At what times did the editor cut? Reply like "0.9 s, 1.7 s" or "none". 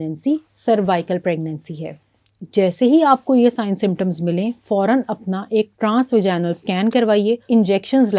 2.3 s, 7.4 s